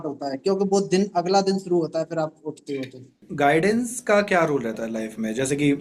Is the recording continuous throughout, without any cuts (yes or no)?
no